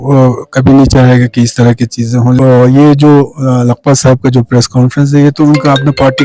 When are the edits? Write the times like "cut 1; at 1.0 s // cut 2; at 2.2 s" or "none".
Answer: cut 1; at 2.4 s